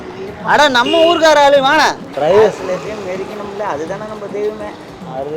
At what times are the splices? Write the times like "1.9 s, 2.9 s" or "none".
2.1 s